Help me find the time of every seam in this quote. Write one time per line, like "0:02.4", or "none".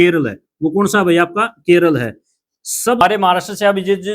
0:03.0